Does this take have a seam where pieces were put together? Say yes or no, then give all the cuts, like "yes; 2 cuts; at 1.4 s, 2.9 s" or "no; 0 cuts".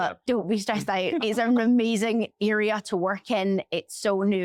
no; 0 cuts